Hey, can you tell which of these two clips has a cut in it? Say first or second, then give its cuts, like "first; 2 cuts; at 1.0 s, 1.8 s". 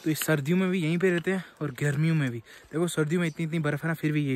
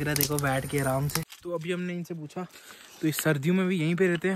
second; 1 cut; at 1.3 s